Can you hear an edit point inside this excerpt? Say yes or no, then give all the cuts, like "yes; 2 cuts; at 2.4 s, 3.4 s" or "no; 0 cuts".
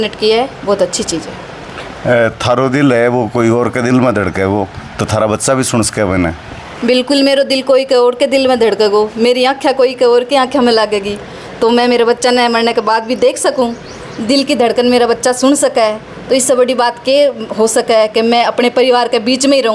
no; 0 cuts